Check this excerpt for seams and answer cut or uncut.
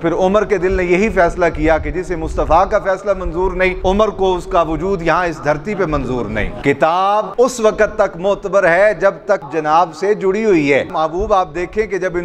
cut